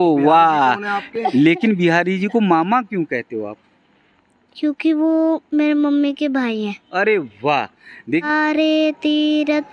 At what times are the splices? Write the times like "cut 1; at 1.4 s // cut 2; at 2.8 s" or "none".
cut 1; at 1.2 s // cut 2; at 8.2 s